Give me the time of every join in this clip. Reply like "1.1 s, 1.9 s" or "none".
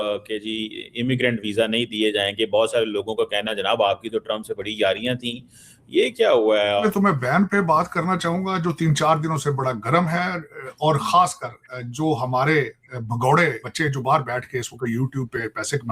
6.8 s, 13.7 s